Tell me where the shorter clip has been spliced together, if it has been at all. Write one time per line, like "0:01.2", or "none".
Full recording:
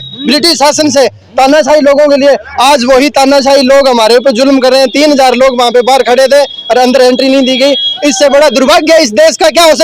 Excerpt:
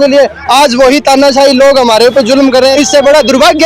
0:02.7